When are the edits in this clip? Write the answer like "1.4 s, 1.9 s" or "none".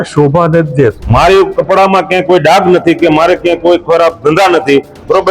1.0 s